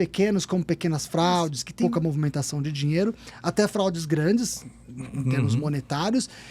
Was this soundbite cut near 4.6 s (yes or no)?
no